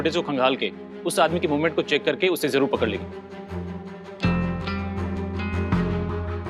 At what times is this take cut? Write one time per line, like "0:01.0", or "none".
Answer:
none